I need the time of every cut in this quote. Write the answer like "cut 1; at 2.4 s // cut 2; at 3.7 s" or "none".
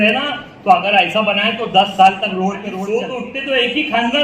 cut 1; at 2.8 s